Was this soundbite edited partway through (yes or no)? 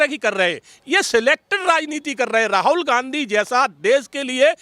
no